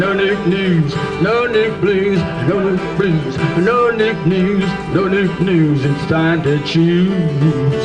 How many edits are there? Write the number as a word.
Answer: zero